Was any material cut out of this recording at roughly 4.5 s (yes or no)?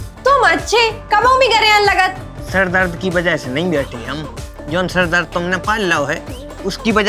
no